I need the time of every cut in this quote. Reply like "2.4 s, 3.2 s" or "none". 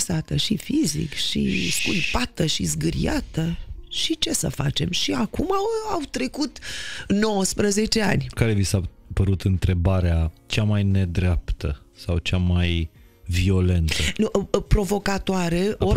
8.3 s, 10.4 s